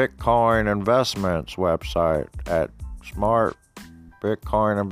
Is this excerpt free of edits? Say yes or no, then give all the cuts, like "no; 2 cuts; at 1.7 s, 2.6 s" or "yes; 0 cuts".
yes; 0 cuts